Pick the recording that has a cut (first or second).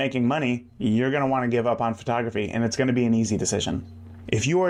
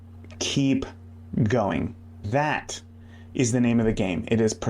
second